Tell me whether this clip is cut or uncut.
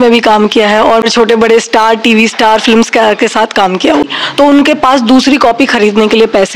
cut